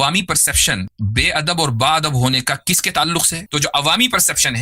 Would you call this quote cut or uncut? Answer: cut